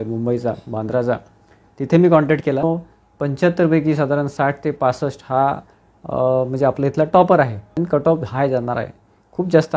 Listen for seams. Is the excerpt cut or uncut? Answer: cut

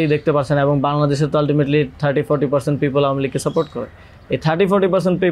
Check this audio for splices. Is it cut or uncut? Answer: uncut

